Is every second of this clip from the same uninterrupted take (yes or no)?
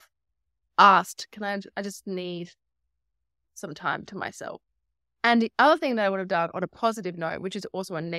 yes